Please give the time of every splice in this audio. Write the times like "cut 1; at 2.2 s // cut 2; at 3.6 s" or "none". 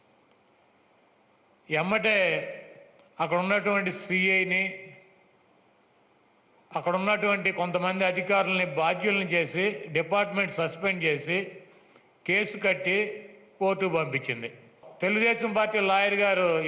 cut 1; at 14.8 s